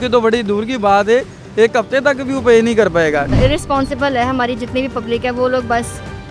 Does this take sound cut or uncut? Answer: cut